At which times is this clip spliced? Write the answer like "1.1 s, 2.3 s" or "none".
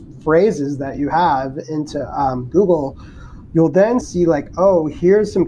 4.0 s